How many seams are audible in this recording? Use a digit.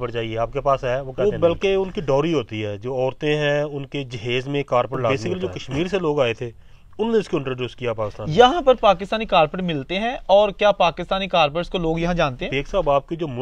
4